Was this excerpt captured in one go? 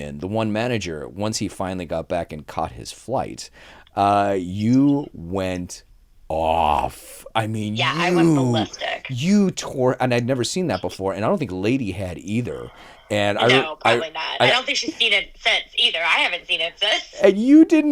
yes; 0 cuts

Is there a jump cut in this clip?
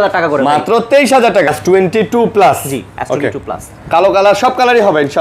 yes; 1 cut; at 1.5 s

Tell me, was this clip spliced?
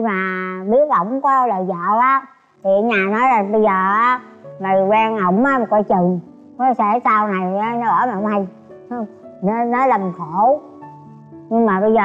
no; 0 cuts

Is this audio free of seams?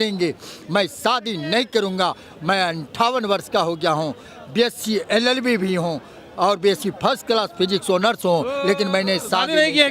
yes; 0 cuts

